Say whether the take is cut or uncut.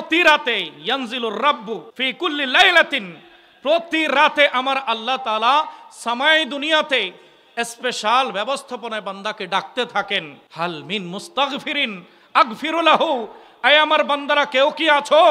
cut